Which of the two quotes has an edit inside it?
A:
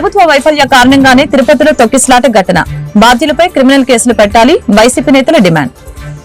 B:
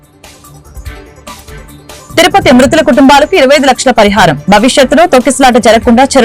B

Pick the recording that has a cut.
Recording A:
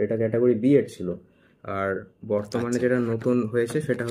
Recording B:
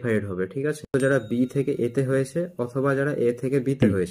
B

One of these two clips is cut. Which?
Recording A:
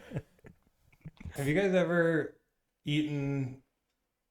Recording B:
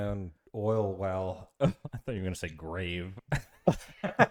A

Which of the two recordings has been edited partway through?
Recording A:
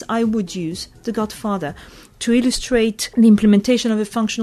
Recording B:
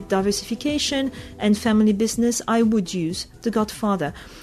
A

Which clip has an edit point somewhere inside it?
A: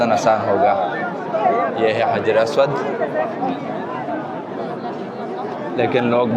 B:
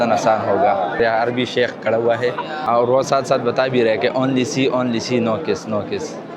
B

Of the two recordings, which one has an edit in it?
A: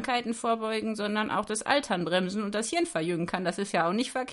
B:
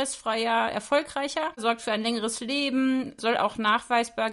B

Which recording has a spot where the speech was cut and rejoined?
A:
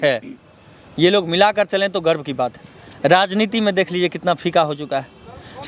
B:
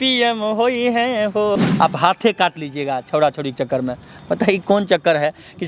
B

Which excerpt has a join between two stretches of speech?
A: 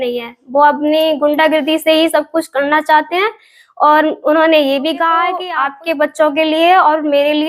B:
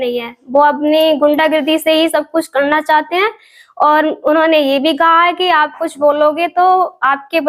A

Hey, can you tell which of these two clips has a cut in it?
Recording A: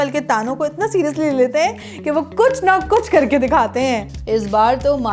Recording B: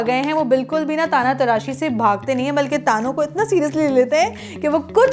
A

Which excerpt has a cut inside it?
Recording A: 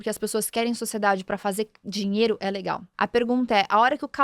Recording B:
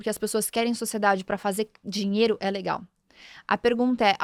A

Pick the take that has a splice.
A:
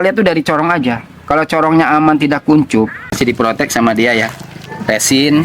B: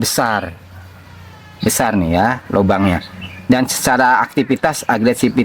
A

